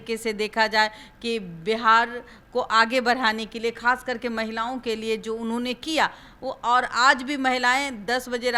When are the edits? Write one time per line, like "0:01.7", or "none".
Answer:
none